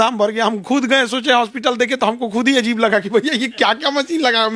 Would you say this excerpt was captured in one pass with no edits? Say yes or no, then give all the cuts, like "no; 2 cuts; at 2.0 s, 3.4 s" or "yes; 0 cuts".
yes; 0 cuts